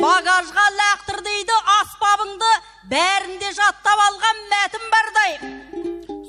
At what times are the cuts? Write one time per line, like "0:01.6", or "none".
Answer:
none